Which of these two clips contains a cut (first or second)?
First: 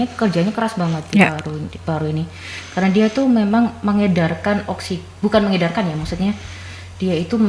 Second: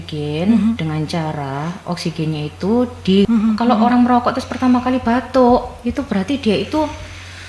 second